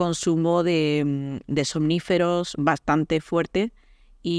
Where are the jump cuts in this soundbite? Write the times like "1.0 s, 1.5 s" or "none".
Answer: none

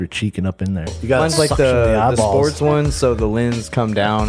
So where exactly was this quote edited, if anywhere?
1.0 s

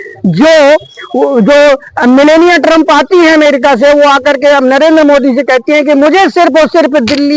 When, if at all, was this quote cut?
none

